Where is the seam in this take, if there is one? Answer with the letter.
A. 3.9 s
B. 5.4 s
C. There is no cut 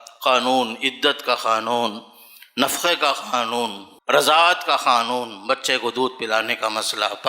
A